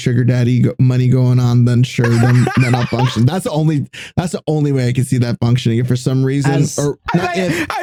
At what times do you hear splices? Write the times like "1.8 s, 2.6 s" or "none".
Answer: none